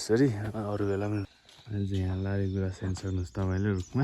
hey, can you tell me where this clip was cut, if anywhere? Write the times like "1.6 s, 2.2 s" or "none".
1.3 s